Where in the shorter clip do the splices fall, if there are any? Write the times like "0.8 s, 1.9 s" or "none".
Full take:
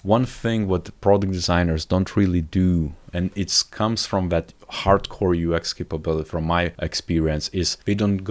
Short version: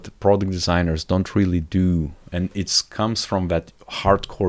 none